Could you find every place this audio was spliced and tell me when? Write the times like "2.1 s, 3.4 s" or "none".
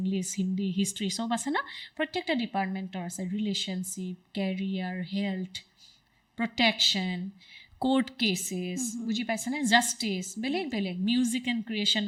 none

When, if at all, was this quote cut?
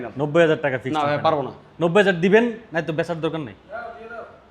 none

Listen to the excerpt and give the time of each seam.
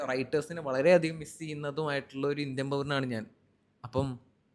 none

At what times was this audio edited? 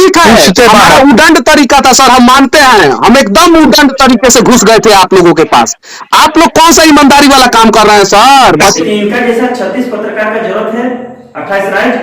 8.8 s

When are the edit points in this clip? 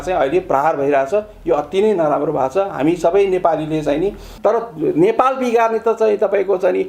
4.3 s

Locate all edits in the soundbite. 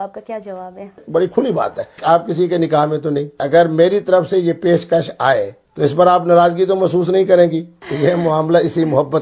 1.0 s, 1.9 s, 3.4 s, 5.6 s, 7.8 s

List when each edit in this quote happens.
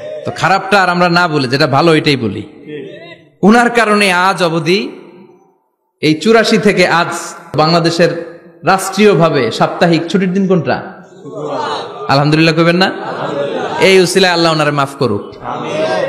7.5 s

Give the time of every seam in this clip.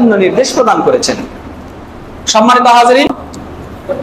3.1 s

